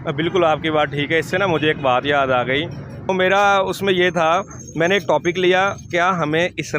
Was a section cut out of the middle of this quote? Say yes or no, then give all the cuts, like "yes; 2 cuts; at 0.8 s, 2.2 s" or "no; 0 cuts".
yes; 1 cut; at 3.1 s